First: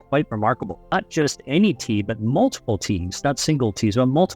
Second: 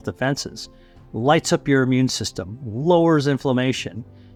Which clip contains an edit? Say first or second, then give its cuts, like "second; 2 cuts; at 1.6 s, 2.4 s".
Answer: first; 1 cut; at 0.9 s